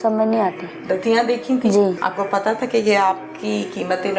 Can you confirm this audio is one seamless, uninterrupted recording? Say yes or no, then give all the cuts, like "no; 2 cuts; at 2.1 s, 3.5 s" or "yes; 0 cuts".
no; 1 cut; at 2.0 s